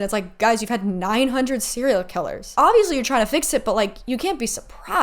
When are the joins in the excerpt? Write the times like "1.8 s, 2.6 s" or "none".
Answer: 2.4 s